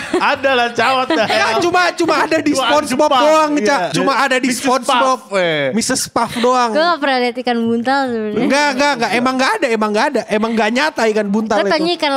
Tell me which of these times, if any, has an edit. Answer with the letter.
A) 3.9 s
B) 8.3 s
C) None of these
A